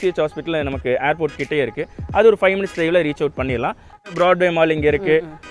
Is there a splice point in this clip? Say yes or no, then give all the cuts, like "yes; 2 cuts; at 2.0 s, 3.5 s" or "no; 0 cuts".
yes; 1 cut; at 3.9 s